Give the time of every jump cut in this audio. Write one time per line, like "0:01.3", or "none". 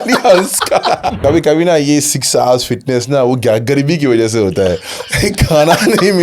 0:01.2